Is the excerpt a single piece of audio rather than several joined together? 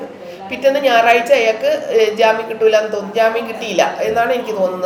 yes; 0 cuts

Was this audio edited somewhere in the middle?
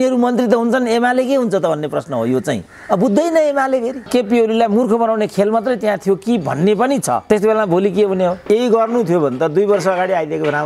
yes; 2 cuts; at 4.1 s, 8.4 s

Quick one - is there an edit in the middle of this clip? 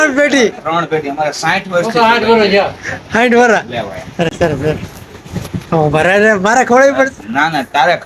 no; 0 cuts

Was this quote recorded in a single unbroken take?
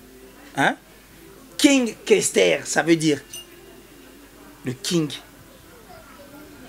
yes; 0 cuts

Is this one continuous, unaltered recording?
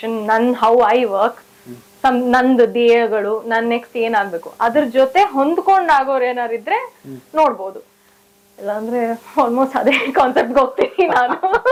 yes; 0 cuts

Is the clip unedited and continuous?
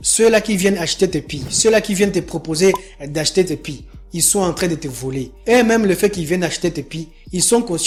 yes; 0 cuts

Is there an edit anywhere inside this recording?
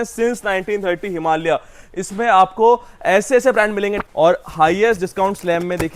yes; 1 cut; at 4.0 s

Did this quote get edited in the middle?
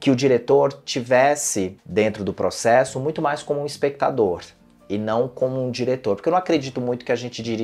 no; 0 cuts

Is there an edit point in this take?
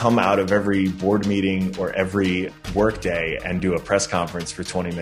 yes; 1 cut; at 2.5 s

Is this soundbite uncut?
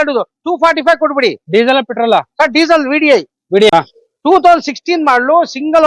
no; 1 cut; at 3.7 s

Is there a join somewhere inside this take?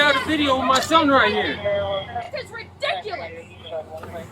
yes; 1 cut; at 2.3 s

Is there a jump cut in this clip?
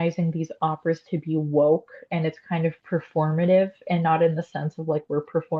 no; 0 cuts

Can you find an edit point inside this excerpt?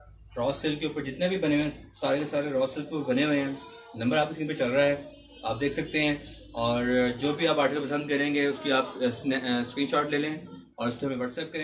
no; 0 cuts

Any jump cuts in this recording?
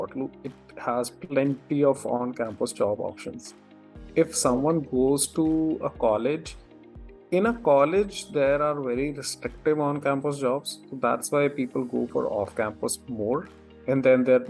no; 0 cuts

